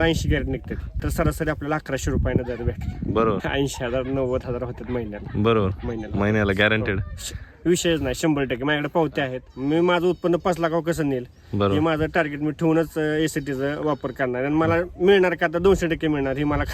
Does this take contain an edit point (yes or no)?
yes